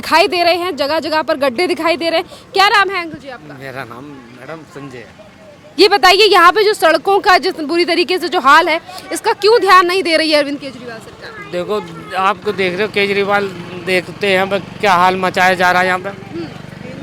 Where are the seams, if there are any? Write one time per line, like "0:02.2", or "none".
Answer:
none